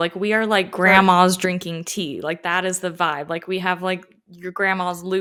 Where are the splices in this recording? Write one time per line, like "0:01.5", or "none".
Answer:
none